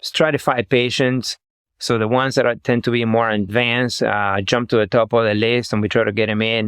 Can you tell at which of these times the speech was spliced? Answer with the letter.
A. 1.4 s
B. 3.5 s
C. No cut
B